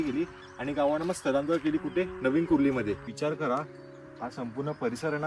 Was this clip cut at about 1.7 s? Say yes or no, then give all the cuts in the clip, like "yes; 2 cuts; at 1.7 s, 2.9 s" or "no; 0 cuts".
no; 1 cut; at 3.1 s